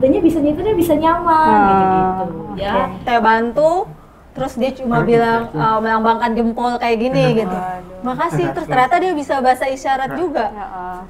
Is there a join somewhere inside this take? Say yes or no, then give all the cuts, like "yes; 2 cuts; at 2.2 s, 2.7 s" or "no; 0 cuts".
yes; 1 cut; at 3.0 s